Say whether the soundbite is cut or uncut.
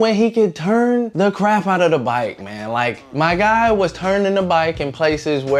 uncut